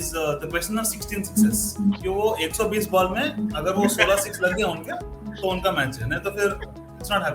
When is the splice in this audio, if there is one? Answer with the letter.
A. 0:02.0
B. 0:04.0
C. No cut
A